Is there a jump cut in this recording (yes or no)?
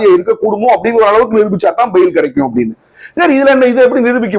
no